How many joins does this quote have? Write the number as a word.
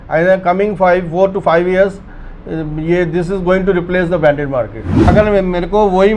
one